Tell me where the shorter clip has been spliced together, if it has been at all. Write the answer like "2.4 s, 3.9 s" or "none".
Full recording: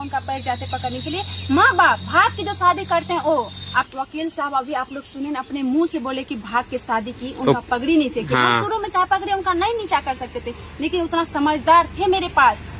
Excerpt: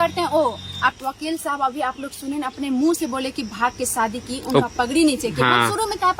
none